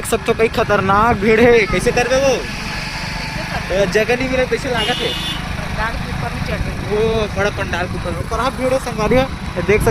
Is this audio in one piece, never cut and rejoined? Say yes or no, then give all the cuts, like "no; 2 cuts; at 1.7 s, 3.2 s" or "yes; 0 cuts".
yes; 0 cuts